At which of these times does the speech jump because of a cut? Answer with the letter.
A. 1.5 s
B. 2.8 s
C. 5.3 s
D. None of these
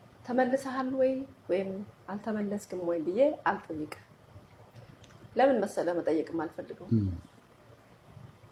D